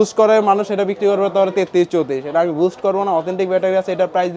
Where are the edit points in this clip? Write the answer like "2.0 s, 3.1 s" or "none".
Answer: none